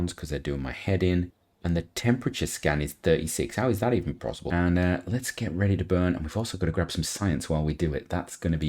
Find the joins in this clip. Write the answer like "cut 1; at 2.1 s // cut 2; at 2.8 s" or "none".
cut 1; at 1.4 s // cut 2; at 4.4 s